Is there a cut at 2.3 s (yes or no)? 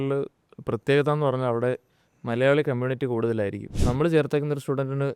no